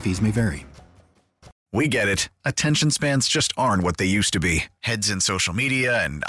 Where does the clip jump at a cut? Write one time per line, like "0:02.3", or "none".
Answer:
0:01.5